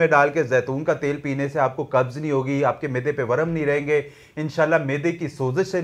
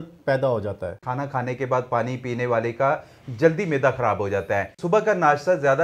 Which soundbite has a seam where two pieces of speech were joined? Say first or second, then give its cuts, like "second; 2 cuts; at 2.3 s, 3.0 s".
second; 2 cuts; at 1.0 s, 4.8 s